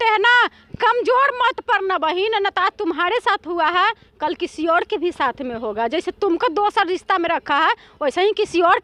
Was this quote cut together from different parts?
no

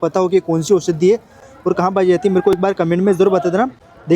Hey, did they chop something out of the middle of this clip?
no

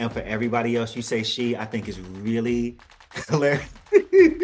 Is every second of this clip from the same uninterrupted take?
yes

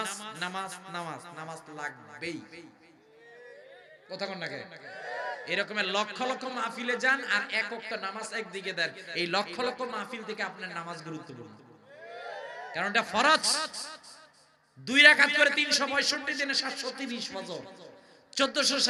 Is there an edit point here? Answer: no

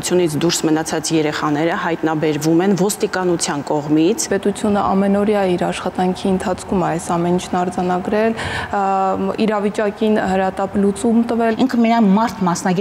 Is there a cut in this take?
yes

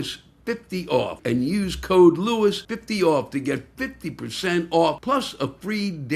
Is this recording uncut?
no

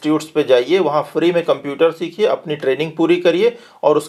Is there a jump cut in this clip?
no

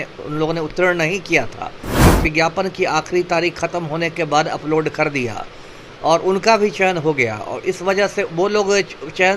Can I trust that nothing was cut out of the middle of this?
no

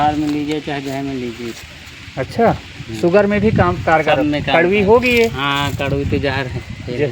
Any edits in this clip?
no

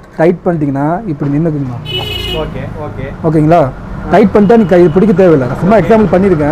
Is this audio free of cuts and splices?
yes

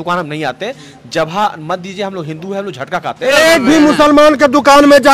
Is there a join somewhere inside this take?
yes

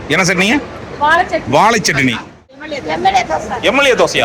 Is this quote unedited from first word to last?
no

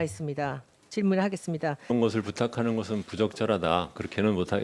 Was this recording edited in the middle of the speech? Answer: no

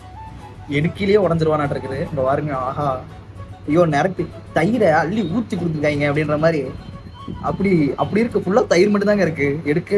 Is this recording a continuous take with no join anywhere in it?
yes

